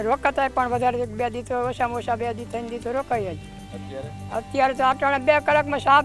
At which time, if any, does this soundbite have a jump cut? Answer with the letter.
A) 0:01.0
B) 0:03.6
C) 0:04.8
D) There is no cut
D